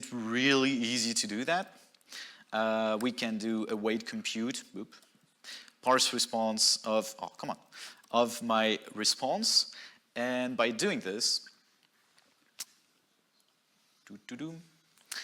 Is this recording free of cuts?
yes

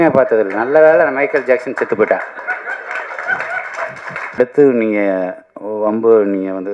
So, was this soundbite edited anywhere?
yes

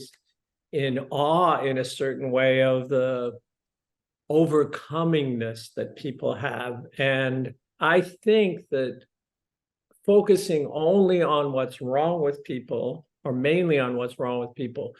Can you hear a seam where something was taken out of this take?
yes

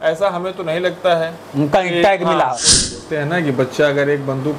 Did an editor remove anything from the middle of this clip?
yes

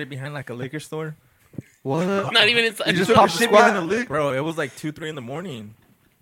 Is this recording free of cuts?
yes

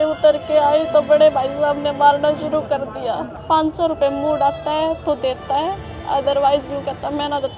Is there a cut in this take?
yes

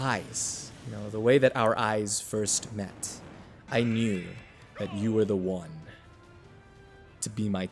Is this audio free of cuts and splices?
yes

